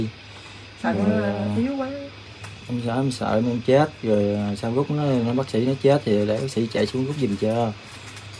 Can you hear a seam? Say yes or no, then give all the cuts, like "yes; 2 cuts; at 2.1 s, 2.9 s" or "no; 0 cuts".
no; 0 cuts